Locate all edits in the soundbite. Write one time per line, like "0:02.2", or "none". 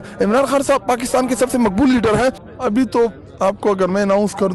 0:02.5